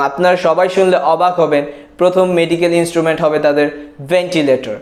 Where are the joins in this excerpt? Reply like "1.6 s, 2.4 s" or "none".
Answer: none